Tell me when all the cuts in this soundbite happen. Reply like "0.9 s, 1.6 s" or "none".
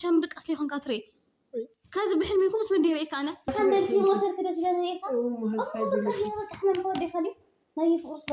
3.5 s